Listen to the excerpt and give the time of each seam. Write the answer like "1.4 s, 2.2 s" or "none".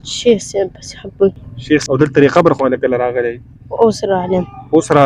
1.8 s

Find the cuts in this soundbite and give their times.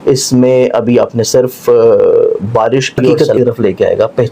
3.2 s

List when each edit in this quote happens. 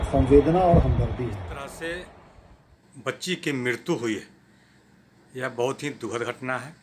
1.4 s

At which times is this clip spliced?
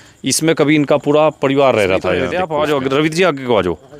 2.3 s

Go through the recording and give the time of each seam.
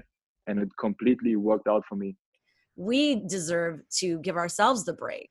2.4 s

